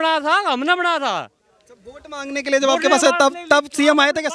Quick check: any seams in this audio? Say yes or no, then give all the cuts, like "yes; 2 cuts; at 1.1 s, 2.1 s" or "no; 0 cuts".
no; 0 cuts